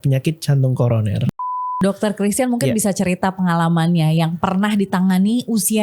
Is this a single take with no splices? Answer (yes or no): no